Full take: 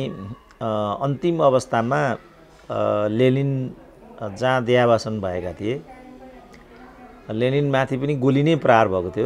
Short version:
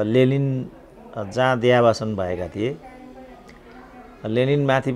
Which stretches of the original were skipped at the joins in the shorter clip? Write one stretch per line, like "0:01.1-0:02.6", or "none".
none